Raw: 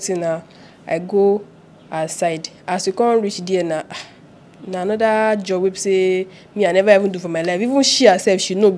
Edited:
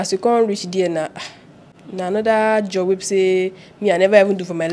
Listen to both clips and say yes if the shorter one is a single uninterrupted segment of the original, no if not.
yes